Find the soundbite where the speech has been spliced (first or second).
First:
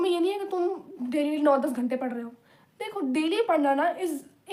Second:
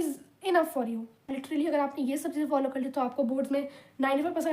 second